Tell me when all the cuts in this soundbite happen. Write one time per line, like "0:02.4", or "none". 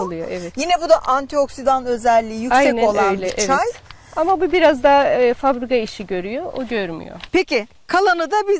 none

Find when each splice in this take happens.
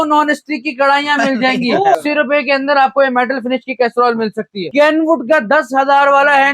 0:02.0
0:04.6

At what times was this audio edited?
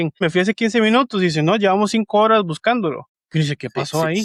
none

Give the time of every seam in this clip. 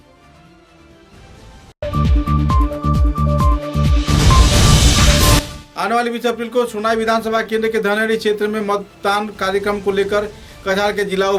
none

